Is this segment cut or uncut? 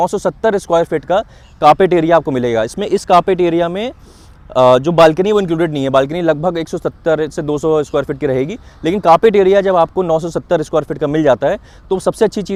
uncut